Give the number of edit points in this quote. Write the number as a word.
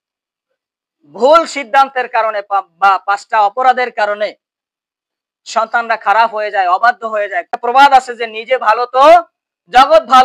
one